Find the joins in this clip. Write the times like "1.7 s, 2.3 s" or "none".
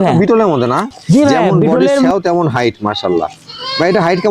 2.1 s